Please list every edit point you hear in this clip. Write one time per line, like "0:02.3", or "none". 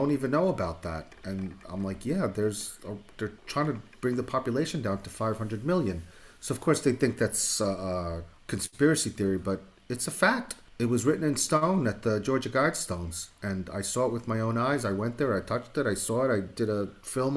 0:01.1
0:03.4
0:08.3
0:10.6